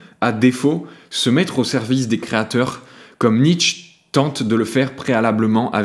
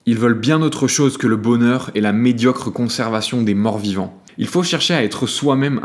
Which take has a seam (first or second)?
second